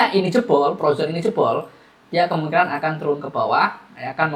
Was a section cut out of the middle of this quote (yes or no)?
no